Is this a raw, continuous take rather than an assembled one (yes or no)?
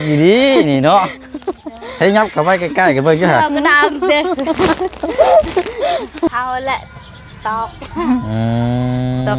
no